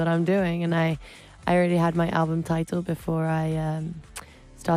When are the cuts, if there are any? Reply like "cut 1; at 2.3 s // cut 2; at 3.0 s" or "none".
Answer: none